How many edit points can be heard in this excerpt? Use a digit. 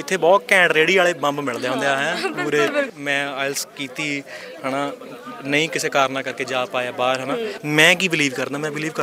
2